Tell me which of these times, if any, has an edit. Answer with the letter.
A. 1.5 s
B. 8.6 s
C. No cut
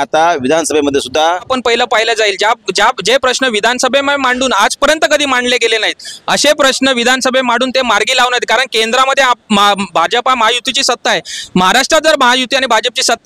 A